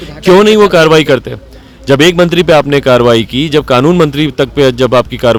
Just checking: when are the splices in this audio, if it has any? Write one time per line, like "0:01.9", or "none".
none